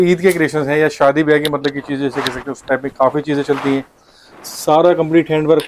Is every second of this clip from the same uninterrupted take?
yes; 0 cuts

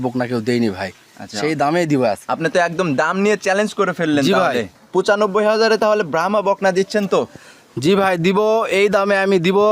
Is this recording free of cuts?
no; 2 cuts; at 2.2 s, 4.8 s

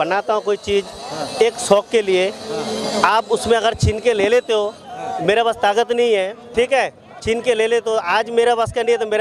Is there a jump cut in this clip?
no; 0 cuts

